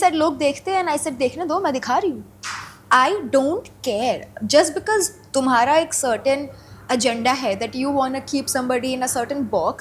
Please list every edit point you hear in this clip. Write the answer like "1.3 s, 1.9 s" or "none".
none